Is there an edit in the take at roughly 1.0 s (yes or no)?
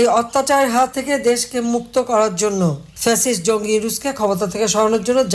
yes